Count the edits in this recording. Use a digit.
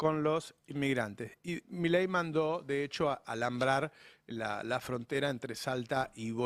0